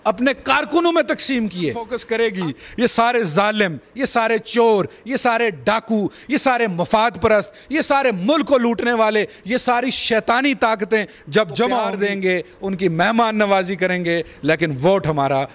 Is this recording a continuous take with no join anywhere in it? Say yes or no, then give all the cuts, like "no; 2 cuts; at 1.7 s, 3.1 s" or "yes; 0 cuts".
no; 2 cuts; at 1.9 s, 11.9 s